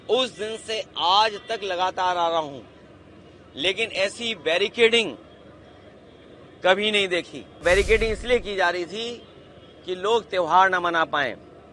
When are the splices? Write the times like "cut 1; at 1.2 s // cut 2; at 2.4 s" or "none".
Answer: cut 1; at 7.6 s